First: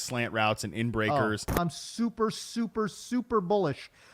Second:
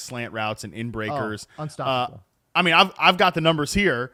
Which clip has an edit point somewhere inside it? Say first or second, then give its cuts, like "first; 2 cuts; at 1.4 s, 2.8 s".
first; 1 cut; at 1.5 s